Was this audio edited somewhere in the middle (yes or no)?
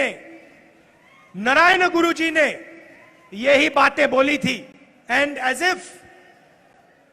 yes